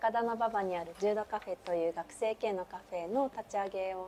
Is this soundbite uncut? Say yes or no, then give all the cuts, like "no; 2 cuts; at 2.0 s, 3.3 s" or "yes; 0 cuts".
yes; 0 cuts